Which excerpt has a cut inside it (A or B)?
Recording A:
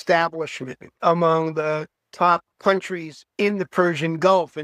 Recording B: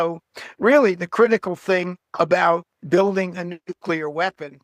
A